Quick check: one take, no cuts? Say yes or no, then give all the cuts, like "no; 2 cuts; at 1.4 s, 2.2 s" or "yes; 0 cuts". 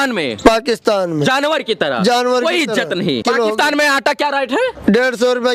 no; 1 cut; at 3.2 s